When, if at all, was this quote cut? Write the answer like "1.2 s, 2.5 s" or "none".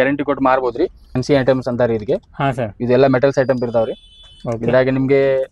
1.1 s